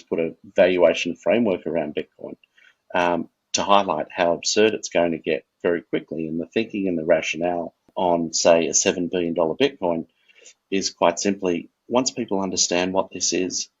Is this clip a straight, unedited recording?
no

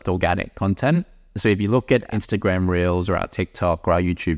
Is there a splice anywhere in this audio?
yes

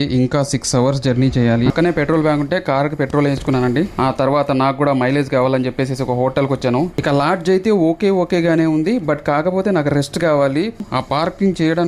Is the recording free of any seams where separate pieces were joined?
no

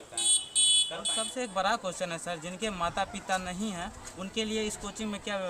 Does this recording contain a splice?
yes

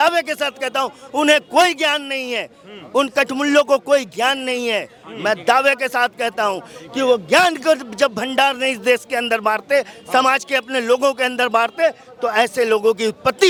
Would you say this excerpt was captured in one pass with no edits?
yes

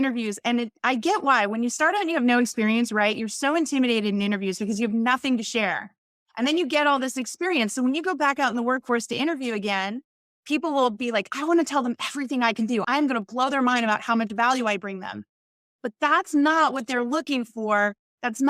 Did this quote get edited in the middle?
yes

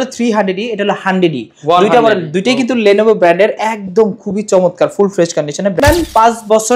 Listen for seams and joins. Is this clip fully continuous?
no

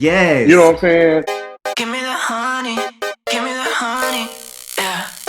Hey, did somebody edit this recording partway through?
yes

